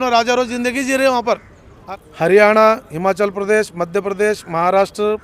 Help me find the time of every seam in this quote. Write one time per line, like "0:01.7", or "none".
0:01.8